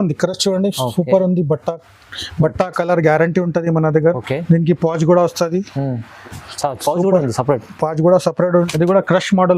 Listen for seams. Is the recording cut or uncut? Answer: cut